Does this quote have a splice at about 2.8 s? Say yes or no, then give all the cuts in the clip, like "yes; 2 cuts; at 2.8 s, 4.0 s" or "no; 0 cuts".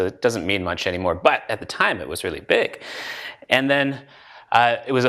no; 1 cut; at 4.1 s